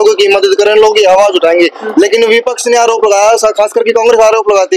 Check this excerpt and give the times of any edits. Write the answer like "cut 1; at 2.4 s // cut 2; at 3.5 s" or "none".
none